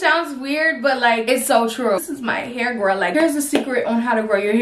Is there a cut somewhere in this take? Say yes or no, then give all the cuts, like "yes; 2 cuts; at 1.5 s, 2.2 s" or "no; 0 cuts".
yes; 1 cut; at 2.0 s